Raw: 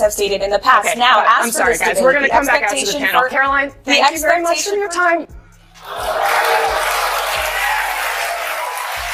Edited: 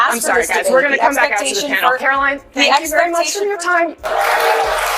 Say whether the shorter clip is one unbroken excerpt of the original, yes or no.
no